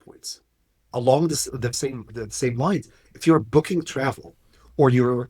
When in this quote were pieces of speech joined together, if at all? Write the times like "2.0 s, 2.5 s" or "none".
0.9 s